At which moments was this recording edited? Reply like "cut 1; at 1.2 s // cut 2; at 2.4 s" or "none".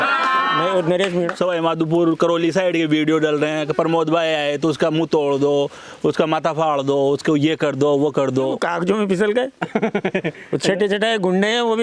cut 1; at 1.3 s // cut 2; at 8.6 s